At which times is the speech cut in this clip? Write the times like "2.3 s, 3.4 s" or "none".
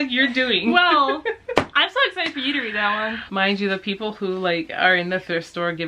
3.2 s

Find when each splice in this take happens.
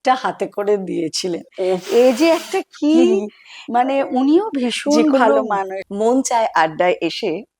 5.8 s

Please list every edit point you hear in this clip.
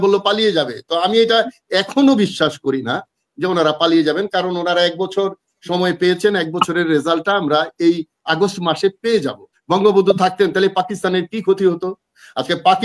9.6 s

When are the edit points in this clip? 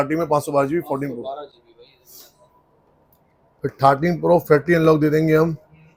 none

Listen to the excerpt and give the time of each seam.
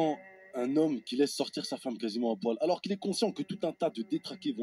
none

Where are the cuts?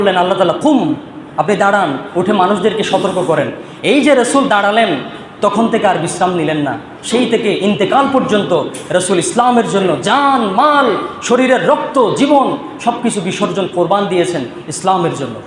none

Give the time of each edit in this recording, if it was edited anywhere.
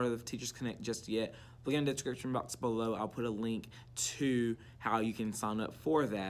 none

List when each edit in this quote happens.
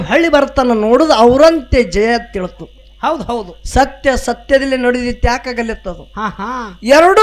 none

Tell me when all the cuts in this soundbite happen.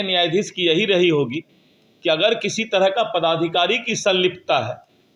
none

